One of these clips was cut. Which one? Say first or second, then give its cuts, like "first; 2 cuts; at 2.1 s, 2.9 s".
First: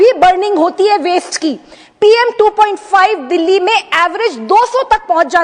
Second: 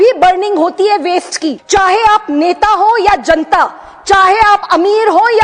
second; 1 cut; at 1.5 s